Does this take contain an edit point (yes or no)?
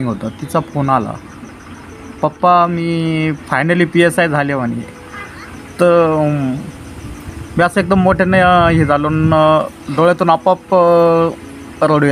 no